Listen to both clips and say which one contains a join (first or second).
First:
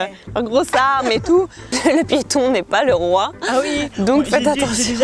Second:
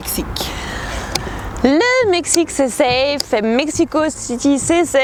first